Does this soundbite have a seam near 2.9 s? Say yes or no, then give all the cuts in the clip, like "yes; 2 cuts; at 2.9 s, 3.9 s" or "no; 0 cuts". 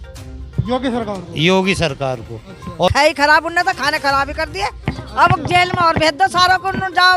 yes; 1 cut; at 2.9 s